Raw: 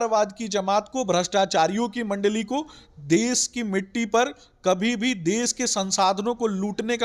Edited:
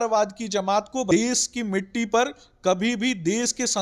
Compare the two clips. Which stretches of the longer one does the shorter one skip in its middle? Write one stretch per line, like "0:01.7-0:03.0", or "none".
0:01.1-0:03.1